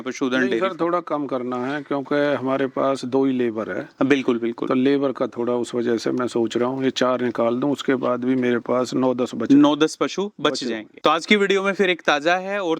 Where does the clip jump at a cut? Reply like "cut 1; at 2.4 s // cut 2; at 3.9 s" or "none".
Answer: none